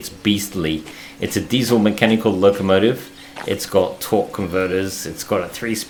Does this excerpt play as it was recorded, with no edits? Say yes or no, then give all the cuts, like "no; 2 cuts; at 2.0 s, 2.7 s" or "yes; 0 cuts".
yes; 0 cuts